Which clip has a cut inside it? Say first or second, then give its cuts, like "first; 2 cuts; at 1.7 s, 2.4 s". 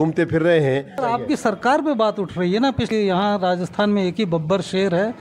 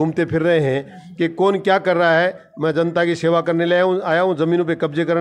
first; 2 cuts; at 1.0 s, 2.9 s